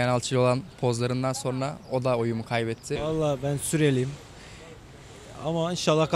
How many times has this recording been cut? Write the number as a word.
one